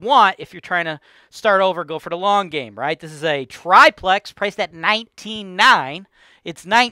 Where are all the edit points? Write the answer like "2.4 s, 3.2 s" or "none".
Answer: none